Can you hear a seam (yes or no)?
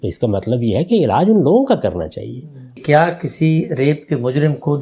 yes